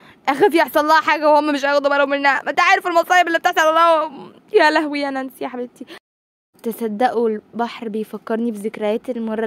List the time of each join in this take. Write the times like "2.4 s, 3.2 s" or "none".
6.0 s